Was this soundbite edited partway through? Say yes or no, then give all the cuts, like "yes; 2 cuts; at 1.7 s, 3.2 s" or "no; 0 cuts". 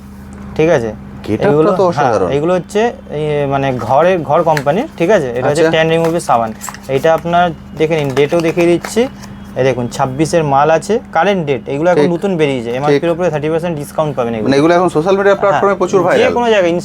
no; 0 cuts